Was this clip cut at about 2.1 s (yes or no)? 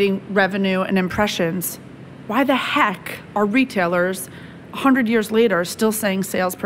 no